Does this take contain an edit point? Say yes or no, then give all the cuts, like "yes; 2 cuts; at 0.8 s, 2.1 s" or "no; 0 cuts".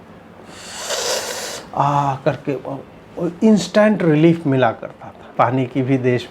yes; 1 cut; at 5.3 s